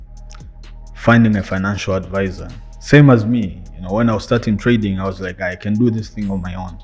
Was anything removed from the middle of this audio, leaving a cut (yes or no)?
no